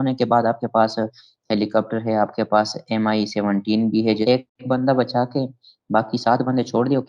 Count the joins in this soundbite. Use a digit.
1